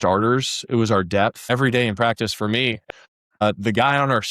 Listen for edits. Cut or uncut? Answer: cut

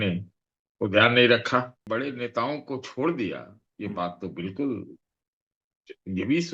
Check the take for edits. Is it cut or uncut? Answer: cut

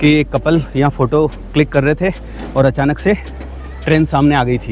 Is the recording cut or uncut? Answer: uncut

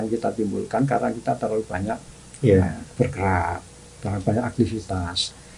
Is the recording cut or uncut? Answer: uncut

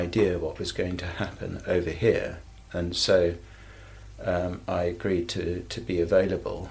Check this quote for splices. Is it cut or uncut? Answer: uncut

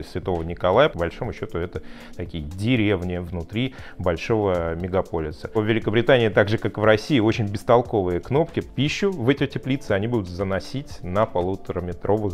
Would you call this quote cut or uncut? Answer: cut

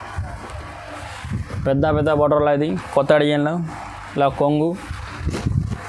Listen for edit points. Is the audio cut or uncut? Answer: uncut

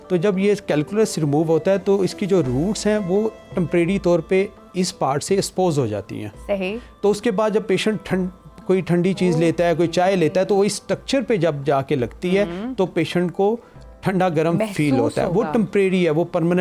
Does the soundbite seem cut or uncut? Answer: uncut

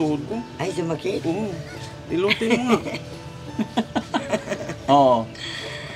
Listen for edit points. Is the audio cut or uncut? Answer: uncut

